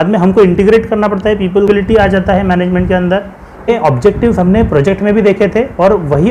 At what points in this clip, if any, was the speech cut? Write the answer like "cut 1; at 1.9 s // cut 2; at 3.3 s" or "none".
cut 1; at 1.7 s // cut 2; at 3.7 s